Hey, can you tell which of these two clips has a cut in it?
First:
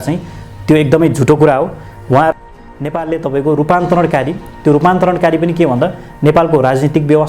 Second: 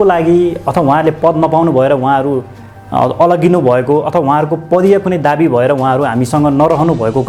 first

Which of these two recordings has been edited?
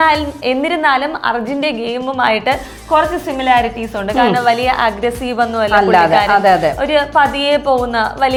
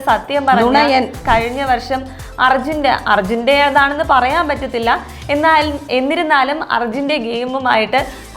second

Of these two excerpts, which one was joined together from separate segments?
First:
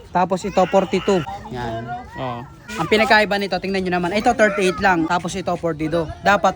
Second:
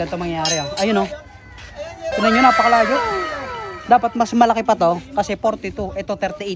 first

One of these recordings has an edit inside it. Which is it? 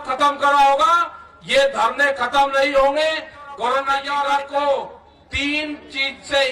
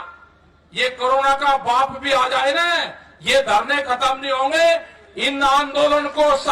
first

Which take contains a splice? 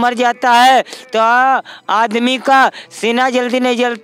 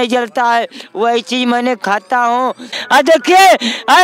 second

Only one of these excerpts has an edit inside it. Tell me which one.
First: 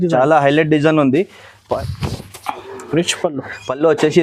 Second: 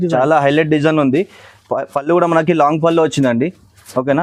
first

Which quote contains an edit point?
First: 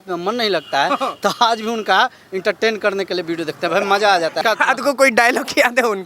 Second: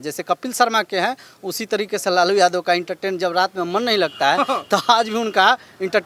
first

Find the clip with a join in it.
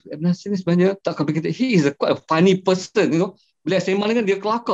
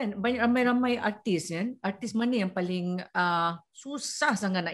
first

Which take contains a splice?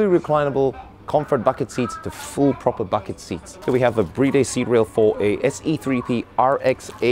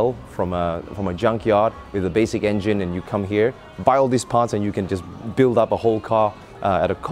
first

